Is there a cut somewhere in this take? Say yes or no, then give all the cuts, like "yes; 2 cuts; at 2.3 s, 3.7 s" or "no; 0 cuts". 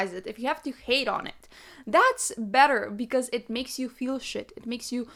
no; 0 cuts